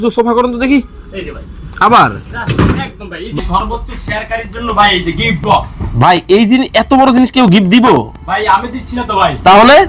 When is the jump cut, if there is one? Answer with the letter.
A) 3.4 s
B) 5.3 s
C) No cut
A